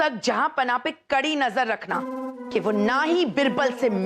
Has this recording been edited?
yes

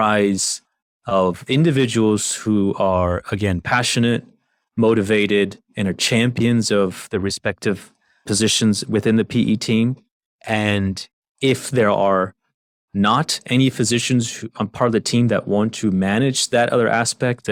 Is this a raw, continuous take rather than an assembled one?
yes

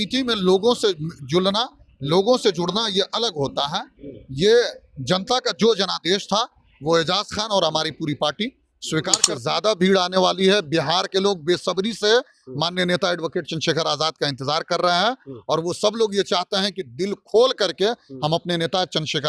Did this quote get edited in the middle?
yes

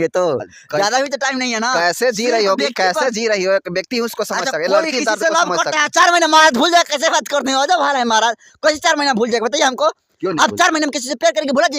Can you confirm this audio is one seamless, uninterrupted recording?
yes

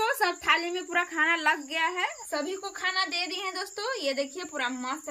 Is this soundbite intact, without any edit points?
no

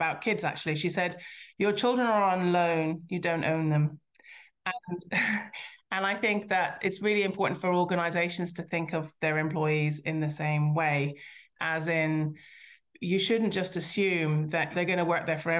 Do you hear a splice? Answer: yes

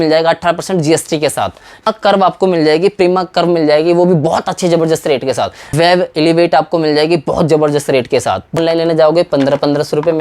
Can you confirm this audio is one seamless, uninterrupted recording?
no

